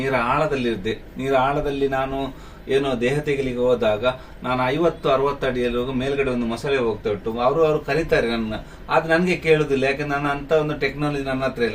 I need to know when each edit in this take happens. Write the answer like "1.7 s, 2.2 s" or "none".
none